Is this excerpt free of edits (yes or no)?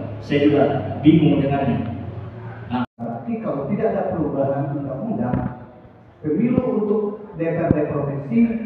no